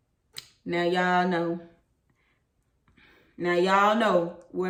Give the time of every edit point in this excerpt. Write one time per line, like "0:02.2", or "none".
none